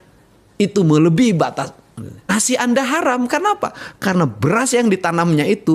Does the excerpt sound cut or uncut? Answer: cut